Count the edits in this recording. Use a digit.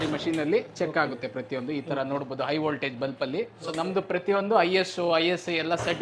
1